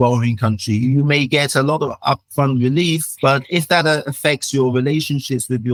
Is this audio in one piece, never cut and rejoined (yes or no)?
yes